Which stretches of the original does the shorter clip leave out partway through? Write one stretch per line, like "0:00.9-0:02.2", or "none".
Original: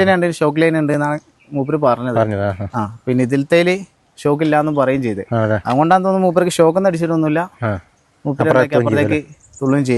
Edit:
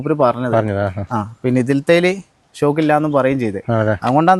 none